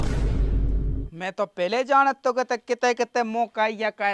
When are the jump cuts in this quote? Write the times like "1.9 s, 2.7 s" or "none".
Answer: 1.1 s